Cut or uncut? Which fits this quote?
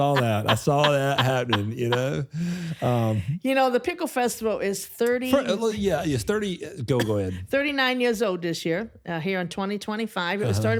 uncut